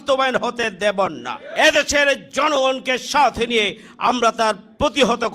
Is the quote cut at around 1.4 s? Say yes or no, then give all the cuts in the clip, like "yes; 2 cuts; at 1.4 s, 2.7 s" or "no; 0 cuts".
yes; 1 cut; at 1.4 s